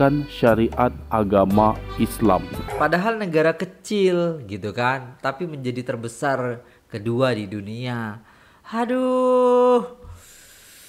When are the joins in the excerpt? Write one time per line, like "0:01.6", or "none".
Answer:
0:02.7